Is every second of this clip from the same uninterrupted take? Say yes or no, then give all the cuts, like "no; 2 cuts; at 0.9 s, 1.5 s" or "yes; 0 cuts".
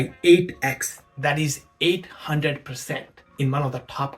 no; 1 cut; at 3.2 s